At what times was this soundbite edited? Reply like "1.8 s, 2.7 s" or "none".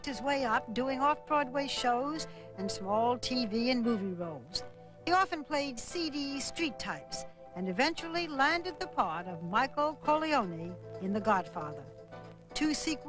7.7 s